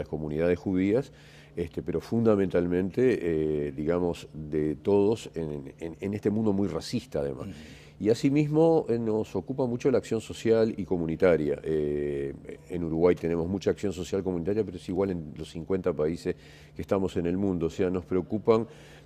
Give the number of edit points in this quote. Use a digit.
1